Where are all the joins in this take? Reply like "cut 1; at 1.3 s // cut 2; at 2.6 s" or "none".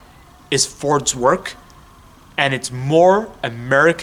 none